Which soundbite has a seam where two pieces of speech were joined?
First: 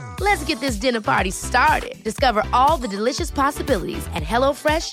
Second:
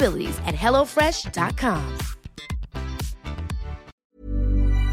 second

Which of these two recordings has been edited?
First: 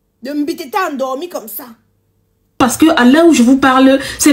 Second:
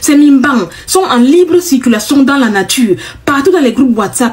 first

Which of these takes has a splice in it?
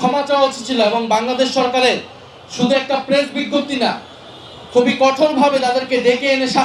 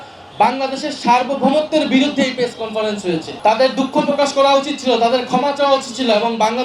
second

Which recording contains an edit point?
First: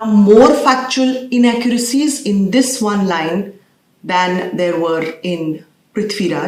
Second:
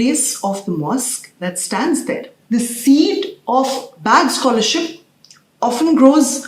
second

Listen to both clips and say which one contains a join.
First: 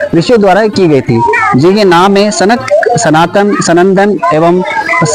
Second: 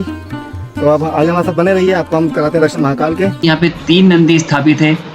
second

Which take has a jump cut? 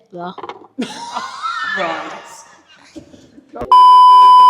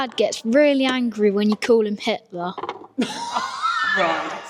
first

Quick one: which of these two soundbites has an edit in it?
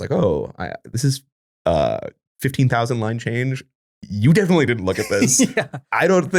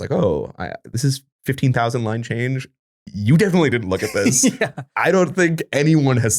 second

